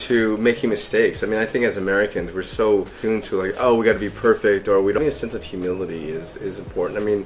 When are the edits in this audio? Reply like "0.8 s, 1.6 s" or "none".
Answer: 2.9 s, 5.0 s